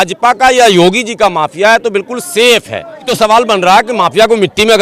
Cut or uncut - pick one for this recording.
cut